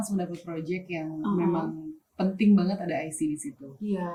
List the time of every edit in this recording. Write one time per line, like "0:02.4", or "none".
none